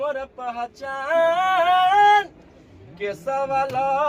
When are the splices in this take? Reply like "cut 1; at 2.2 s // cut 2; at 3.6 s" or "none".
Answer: none